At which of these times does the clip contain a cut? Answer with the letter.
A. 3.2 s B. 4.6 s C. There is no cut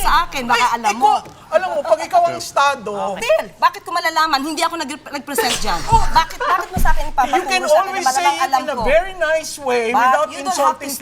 A